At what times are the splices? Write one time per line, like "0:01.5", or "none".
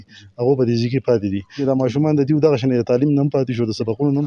0:01.6